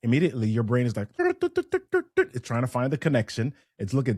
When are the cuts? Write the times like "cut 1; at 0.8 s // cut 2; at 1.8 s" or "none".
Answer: cut 1; at 1.2 s